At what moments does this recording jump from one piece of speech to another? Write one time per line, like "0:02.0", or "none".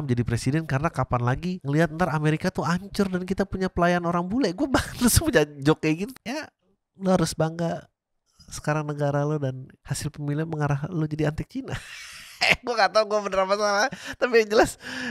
0:06.1